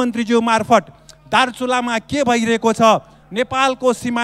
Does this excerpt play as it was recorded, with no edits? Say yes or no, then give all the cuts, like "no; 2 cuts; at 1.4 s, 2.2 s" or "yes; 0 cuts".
yes; 0 cuts